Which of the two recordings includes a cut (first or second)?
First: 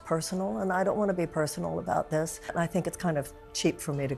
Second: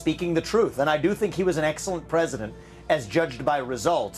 first